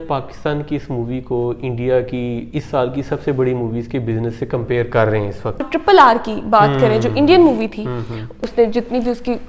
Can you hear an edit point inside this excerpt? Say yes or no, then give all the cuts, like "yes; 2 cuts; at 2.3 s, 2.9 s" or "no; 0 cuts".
yes; 2 cuts; at 5.7 s, 8.4 s